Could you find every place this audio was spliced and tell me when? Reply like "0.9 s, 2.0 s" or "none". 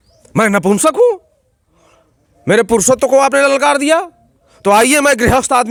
none